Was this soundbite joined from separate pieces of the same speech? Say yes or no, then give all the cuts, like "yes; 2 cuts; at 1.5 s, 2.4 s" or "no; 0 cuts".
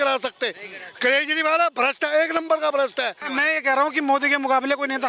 yes; 1 cut; at 3.2 s